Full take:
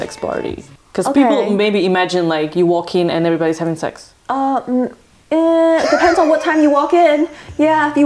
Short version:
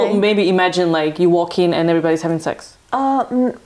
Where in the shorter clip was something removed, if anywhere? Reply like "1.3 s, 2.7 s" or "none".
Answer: none